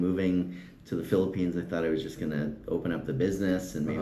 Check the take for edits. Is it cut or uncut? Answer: uncut